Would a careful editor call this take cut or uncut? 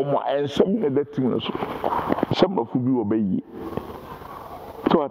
cut